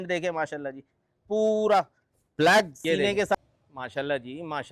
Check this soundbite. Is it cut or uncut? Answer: cut